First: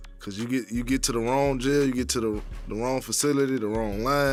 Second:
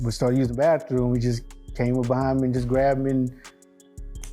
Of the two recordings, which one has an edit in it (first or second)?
second